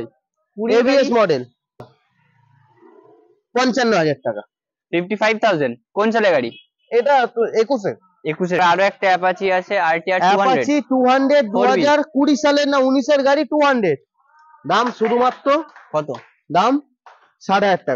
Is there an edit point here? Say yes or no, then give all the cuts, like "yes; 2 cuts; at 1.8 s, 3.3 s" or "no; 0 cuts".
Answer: yes; 2 cuts; at 1.8 s, 8.6 s